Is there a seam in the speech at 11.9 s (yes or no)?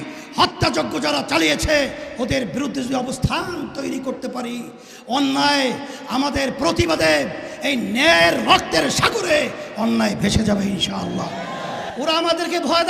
yes